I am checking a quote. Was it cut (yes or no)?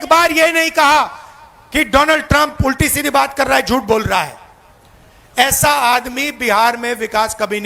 no